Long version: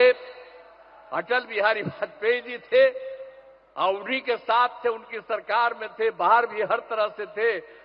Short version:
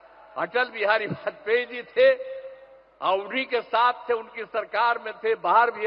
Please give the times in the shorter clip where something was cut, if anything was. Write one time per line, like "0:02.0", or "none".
none